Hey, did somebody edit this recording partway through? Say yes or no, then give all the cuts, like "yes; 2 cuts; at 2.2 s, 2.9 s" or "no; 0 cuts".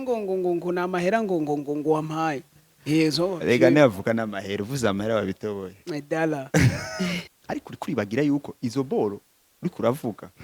yes; 1 cut; at 7.3 s